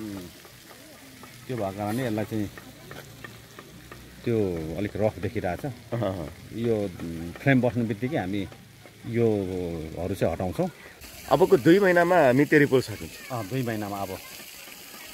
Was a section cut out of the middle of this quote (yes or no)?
yes